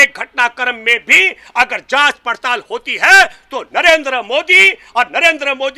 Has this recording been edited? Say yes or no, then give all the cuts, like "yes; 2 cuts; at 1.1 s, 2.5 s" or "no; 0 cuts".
no; 0 cuts